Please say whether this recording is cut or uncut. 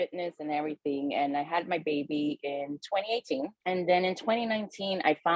cut